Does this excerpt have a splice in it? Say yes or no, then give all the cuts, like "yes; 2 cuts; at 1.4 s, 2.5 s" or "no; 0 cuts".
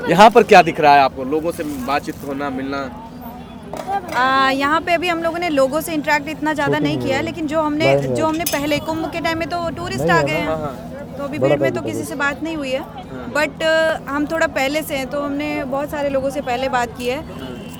no; 0 cuts